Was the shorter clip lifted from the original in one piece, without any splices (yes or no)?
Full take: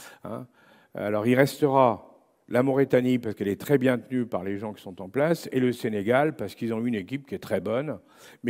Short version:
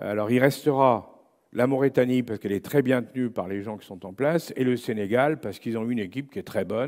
yes